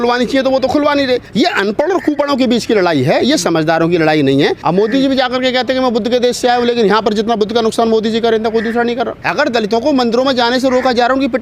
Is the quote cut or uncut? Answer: cut